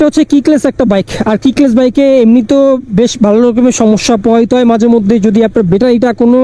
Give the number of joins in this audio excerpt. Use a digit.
0